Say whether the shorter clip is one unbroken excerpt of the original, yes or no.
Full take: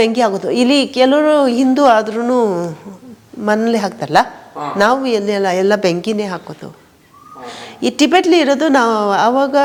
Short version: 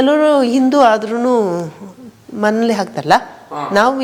yes